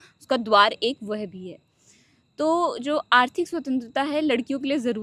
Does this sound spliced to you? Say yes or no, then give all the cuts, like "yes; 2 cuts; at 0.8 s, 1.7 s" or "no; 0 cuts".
no; 0 cuts